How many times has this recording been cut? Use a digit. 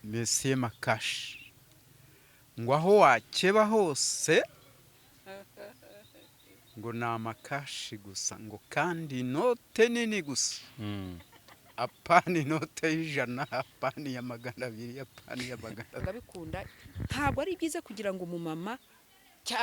1